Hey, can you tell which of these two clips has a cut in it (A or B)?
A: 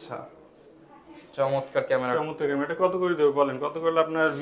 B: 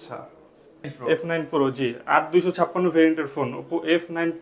B